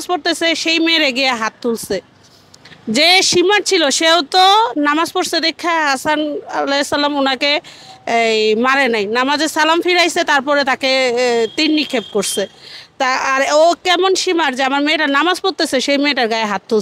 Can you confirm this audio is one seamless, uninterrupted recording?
yes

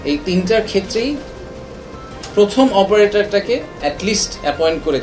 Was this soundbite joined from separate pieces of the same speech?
no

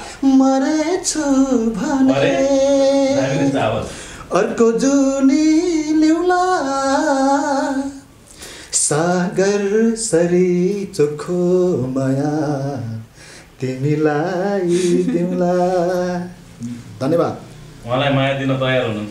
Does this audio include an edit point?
no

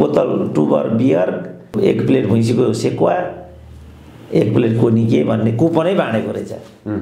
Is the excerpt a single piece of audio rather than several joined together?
no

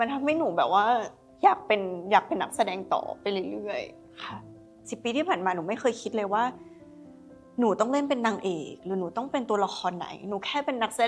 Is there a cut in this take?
yes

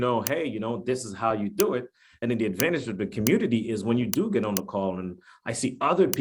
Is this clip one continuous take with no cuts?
yes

